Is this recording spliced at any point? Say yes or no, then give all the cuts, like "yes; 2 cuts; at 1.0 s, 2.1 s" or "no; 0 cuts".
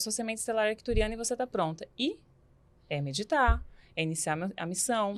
no; 0 cuts